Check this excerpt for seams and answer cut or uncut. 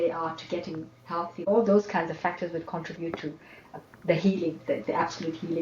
cut